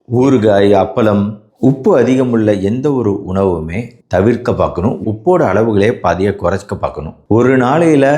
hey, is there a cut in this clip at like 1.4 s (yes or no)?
no